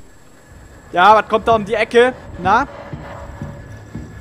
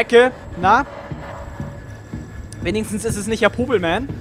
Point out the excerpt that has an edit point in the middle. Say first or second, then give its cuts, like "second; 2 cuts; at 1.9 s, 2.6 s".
first; 1 cut; at 0.9 s